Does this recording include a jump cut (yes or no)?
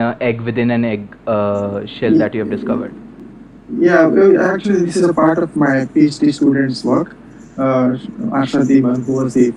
no